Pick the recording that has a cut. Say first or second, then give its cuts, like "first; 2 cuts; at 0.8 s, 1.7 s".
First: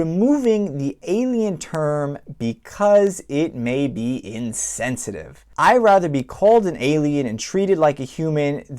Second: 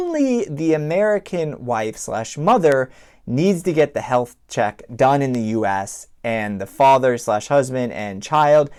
first; 1 cut; at 5.4 s